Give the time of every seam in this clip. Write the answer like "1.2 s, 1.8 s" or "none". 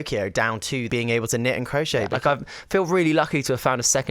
0.9 s, 2.1 s